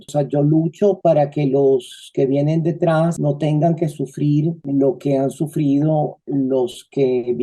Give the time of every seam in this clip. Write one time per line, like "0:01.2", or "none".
none